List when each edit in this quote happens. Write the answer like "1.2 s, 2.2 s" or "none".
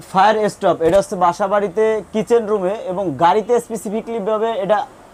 none